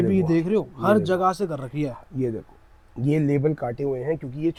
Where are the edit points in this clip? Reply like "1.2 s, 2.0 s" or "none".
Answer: none